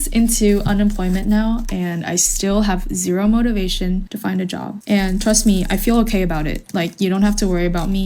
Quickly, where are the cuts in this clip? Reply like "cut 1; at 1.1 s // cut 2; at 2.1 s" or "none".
none